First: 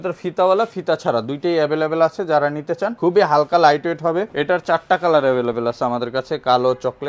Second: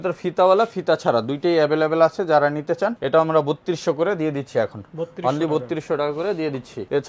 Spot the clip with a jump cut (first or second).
first